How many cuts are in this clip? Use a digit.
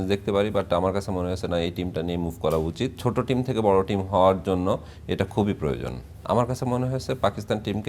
2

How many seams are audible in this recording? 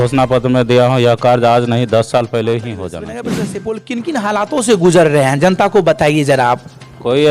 1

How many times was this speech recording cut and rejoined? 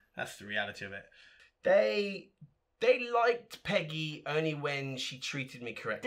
1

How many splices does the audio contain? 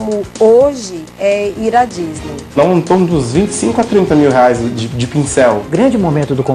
2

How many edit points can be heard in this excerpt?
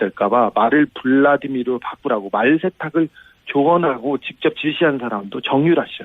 1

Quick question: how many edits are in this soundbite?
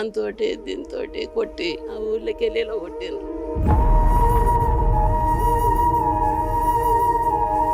1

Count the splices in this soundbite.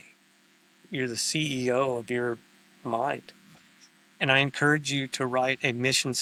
0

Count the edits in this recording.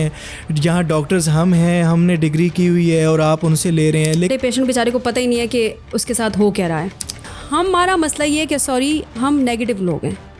2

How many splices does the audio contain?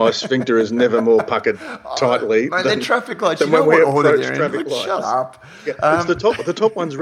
0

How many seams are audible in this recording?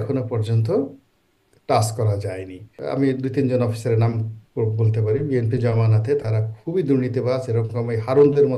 1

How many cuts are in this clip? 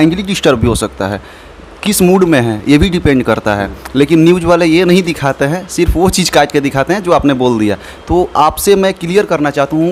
0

